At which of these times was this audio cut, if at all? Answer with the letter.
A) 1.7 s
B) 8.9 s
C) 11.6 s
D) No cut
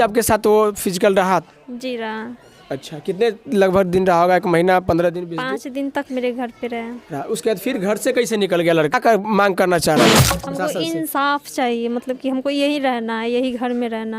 B